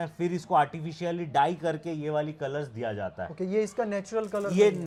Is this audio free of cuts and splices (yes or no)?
yes